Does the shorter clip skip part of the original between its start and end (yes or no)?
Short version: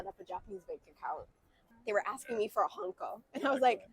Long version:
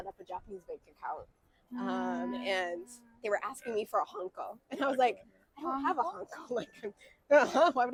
yes